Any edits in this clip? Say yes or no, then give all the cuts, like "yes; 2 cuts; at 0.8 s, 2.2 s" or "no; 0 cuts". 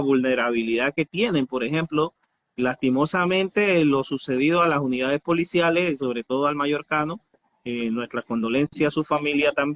no; 0 cuts